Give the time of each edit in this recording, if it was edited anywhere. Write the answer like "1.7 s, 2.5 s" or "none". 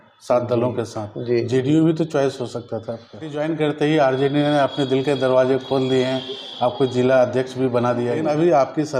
3.4 s, 8.2 s